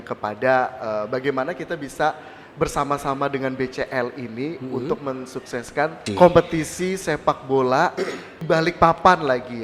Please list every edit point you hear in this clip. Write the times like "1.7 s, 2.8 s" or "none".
6.1 s, 8.4 s